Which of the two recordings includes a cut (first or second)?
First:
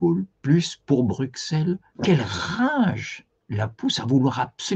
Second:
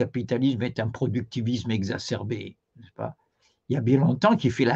first